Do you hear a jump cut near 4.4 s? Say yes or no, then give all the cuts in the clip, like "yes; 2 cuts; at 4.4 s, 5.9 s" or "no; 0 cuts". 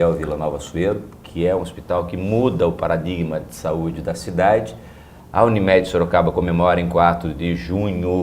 no; 1 cut; at 3.0 s